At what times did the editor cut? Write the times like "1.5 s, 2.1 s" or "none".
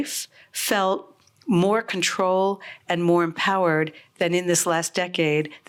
none